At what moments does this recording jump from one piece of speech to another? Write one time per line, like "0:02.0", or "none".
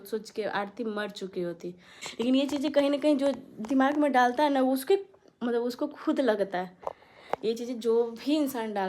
0:02.0